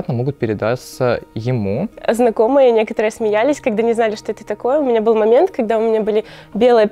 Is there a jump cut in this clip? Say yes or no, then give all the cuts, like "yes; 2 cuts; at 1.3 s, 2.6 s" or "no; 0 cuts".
yes; 1 cut; at 1.9 s